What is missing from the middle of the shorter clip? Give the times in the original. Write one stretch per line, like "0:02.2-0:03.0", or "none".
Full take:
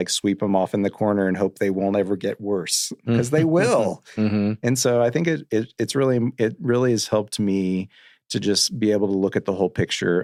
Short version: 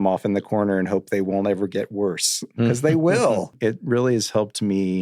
0:04.0-0:06.3